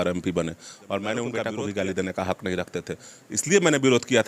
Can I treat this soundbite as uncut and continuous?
no; 1 cut; at 1.4 s

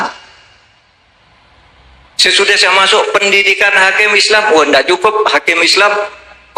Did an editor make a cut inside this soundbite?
no; 0 cuts

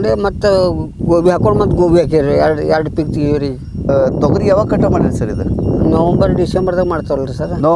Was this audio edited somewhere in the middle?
no; 0 cuts

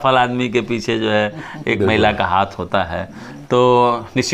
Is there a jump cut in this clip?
no; 0 cuts

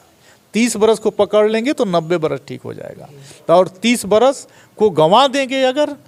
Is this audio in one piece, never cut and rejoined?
yes; 0 cuts

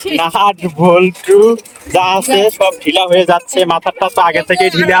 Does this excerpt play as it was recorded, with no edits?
yes; 0 cuts

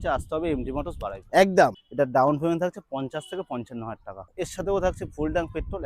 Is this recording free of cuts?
no; 2 cuts; at 1.8 s, 4.3 s

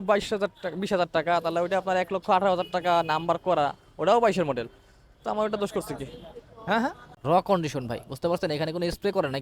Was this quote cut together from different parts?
yes; 1 cut; at 7.1 s

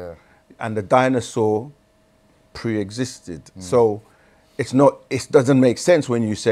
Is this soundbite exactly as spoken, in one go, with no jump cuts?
yes; 0 cuts

